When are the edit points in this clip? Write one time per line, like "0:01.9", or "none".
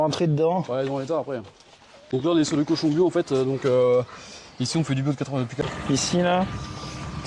0:02.0
0:05.6

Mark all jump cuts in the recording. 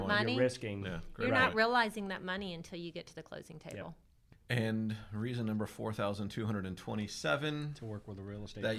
0:04.1

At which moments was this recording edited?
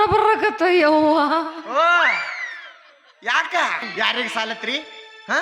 0:03.9

